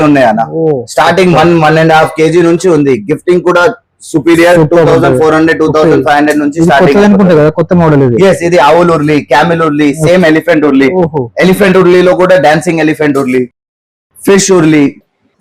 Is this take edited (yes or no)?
no